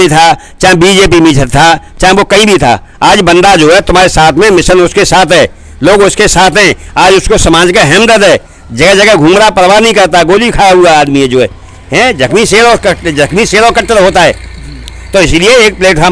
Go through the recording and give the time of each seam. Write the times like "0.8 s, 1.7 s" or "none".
none